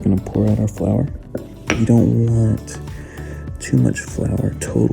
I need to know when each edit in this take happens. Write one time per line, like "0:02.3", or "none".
0:01.5